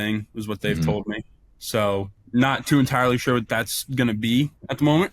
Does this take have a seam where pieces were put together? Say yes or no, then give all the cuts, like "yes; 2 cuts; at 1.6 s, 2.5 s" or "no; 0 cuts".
yes; 1 cut; at 2.2 s